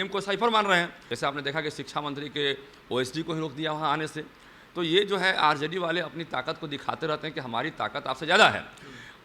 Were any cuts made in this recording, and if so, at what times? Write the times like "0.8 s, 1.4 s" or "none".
1.0 s